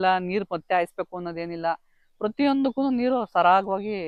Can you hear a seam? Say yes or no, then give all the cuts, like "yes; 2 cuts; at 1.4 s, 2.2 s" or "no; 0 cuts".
no; 0 cuts